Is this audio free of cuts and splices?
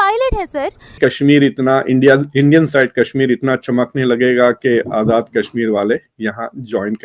no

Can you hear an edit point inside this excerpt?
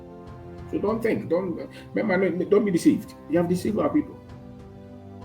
yes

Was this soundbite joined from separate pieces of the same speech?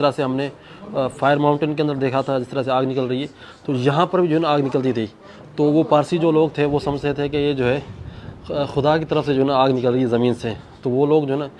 no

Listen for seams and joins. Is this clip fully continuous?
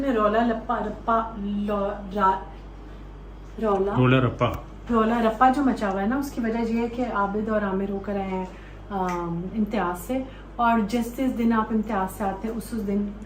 yes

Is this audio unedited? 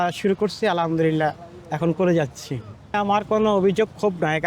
no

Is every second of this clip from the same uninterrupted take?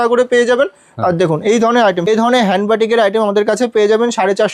no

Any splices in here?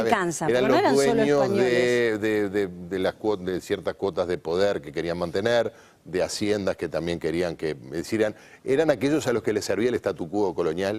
no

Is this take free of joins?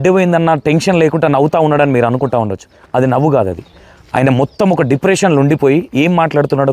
yes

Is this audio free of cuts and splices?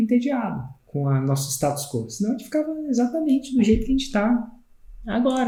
yes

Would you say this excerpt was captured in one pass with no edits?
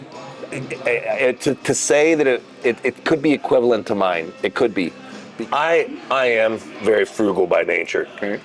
no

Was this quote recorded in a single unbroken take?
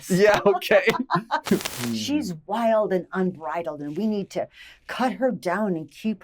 no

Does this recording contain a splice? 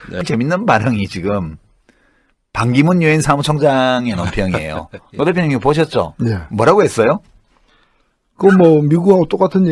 no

